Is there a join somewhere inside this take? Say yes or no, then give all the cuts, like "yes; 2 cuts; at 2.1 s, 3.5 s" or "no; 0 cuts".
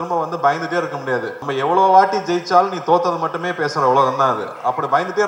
yes; 1 cut; at 1.4 s